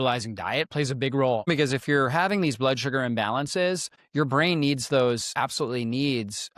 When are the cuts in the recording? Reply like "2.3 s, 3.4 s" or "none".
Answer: 1.5 s